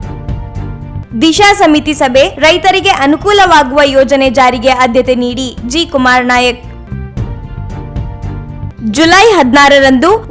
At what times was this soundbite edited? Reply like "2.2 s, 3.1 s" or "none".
1.0 s